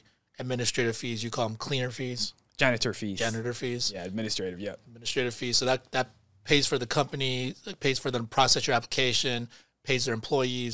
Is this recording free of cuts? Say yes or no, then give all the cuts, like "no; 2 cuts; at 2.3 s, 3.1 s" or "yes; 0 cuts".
yes; 0 cuts